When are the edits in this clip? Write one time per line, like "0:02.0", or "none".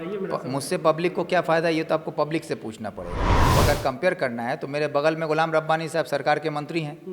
0:03.5